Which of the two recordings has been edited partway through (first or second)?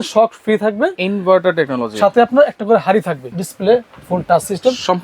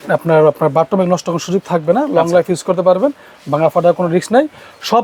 first